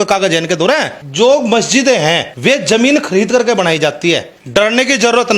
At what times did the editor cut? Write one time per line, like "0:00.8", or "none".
0:01.0
0:02.3
0:04.3